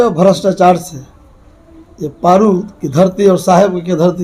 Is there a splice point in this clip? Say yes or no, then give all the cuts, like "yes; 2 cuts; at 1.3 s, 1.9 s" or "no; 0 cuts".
no; 0 cuts